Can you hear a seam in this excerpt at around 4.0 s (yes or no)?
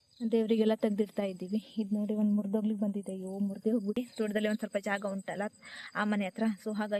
yes